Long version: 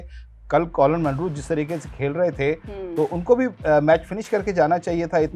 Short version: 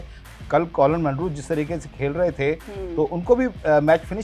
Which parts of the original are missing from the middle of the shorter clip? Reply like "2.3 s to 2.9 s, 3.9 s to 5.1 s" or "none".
none

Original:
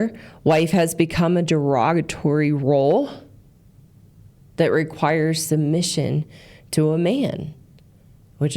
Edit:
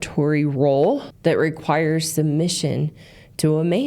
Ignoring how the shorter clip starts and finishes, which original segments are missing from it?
3.2 s to 4.4 s

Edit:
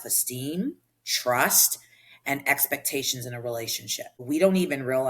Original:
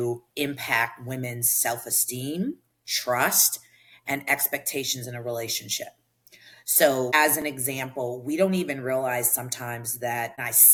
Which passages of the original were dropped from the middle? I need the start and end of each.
6.0 s to 8.2 s

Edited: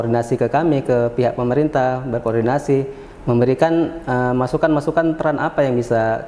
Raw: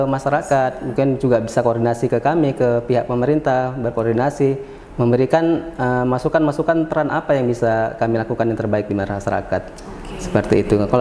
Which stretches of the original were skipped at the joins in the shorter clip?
none

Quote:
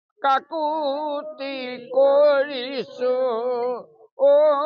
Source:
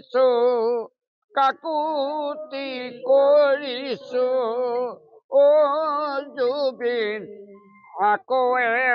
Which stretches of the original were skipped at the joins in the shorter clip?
none

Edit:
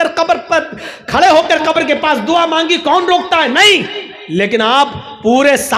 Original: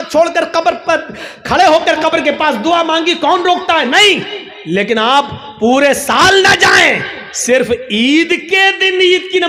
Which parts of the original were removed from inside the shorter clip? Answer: none

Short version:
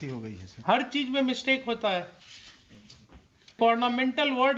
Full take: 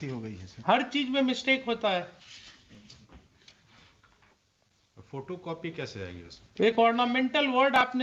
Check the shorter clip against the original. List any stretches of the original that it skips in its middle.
3.6 s to 6.7 s

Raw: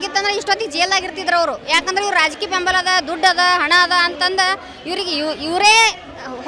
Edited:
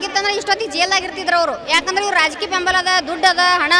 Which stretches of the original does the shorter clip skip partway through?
none

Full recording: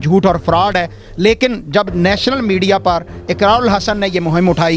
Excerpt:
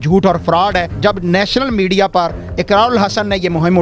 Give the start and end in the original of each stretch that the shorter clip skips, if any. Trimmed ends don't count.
0.9 s to 1.6 s

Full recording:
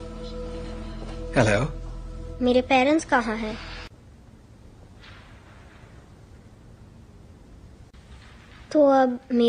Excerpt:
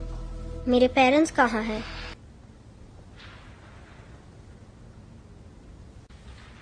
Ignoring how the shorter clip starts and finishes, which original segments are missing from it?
3.9 s to 4.0 s

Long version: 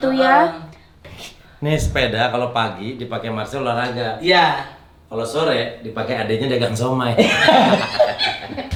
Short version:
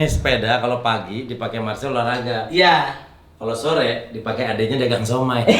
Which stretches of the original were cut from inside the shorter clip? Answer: none

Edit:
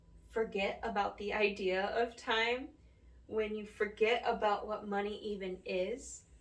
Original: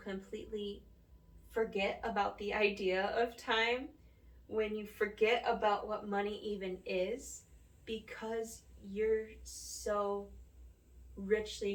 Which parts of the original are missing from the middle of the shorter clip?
none

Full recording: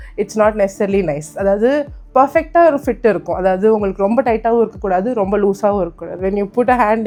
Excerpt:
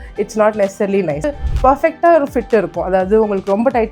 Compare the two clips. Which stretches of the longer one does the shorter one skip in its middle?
1.3 s to 1.8 s

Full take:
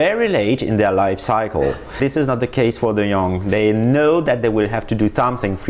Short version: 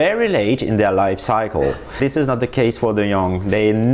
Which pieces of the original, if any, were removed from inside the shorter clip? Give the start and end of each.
none

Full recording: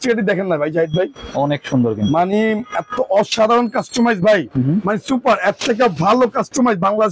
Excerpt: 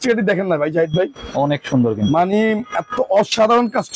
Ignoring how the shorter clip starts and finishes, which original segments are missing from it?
none

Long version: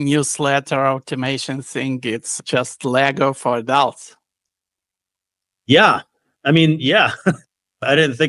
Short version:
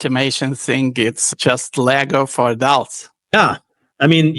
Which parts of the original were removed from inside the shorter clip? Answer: 4.4 s to 5.8 s

